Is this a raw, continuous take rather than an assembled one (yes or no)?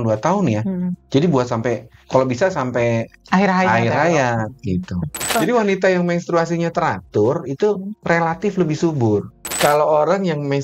no